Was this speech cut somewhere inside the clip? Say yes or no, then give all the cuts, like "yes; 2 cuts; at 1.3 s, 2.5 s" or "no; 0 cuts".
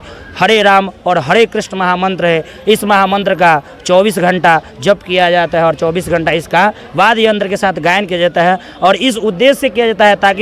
no; 0 cuts